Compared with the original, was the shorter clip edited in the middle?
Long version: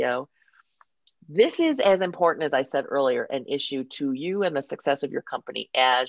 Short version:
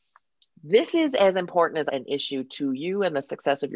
yes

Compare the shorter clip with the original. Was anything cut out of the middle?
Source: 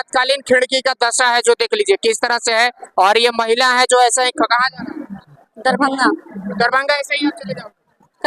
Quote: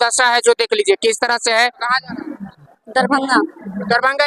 yes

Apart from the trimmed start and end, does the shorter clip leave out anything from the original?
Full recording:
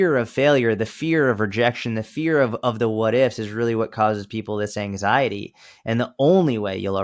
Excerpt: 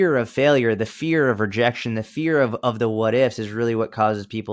no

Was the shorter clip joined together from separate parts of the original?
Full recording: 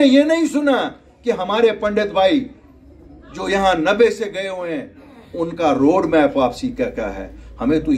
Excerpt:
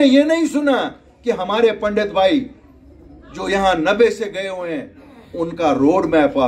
no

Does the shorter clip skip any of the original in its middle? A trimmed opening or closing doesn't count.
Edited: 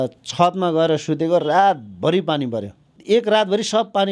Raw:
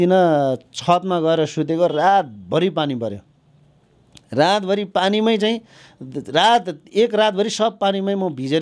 yes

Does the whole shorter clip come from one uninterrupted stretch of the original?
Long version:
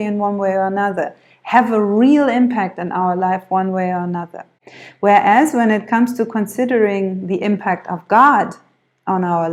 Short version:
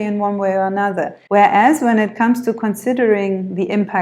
no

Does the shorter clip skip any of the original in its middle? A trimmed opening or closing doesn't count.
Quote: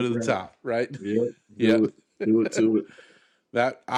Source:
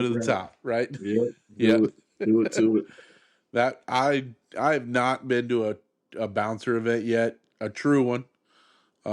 no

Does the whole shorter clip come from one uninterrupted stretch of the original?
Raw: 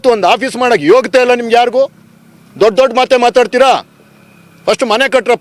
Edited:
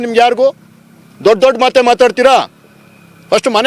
yes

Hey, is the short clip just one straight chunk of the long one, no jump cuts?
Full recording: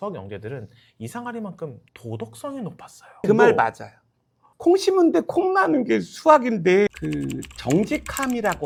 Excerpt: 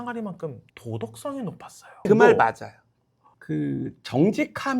no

